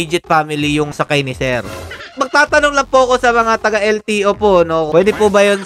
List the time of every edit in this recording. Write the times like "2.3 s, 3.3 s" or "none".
2.1 s